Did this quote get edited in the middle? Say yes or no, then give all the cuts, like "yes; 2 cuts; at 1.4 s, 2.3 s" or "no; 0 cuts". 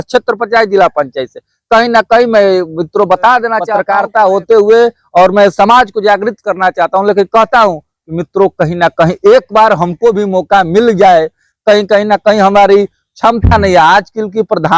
yes; 1 cut; at 3.7 s